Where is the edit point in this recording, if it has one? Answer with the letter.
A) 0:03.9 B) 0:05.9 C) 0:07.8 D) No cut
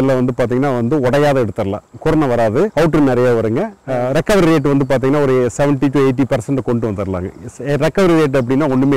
A